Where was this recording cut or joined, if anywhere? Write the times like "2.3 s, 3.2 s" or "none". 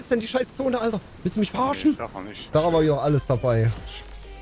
2.4 s